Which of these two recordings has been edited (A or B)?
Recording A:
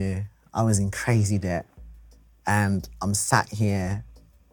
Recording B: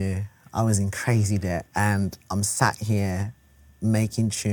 B